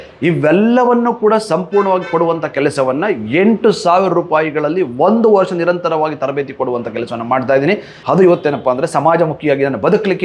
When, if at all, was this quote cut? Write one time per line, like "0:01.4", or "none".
0:08.0